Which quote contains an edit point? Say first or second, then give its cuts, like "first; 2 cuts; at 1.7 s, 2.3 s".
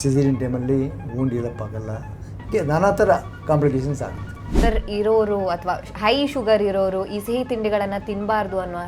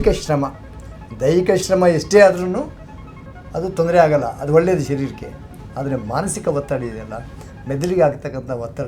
first; 1 cut; at 4.6 s